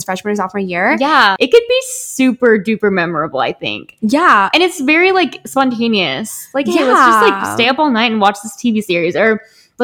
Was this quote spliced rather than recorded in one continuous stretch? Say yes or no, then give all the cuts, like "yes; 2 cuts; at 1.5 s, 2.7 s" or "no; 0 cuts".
yes; 1 cut; at 1.3 s